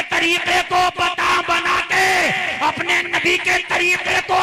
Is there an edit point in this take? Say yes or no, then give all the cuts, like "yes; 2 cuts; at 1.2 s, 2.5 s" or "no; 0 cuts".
no; 0 cuts